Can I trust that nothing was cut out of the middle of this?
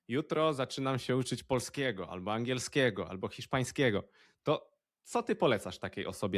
yes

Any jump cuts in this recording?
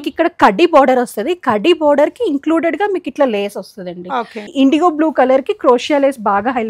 yes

